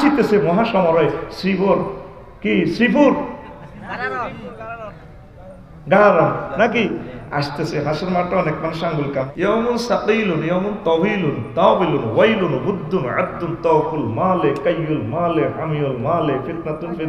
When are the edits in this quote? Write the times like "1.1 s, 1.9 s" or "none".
9.3 s

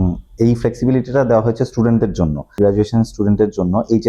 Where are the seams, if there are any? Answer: 2.6 s

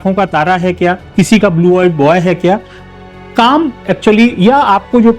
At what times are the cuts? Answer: none

